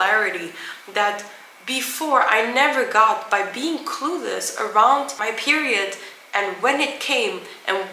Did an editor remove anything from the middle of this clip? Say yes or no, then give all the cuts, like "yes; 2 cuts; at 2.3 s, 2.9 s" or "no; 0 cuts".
yes; 1 cut; at 5.1 s